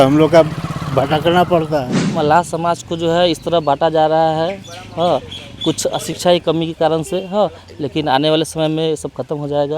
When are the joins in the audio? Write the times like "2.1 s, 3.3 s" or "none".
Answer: 2.0 s